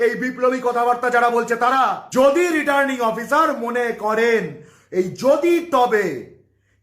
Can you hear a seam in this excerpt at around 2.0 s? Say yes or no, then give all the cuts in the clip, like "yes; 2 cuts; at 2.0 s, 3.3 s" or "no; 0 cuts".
yes; 1 cut; at 2.0 s